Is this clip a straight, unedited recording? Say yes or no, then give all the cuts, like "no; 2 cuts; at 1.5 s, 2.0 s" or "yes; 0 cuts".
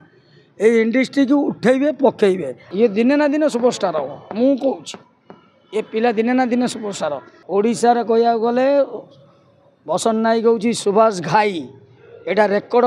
no; 2 cuts; at 2.7 s, 7.3 s